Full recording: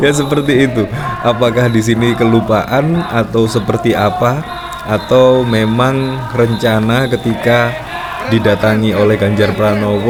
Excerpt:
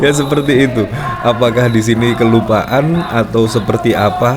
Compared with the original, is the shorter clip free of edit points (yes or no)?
yes